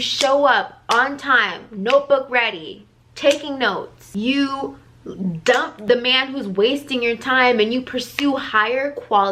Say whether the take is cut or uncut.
cut